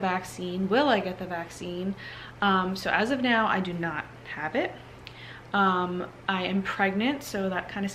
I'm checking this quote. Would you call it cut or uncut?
uncut